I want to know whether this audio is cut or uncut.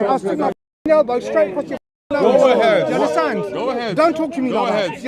uncut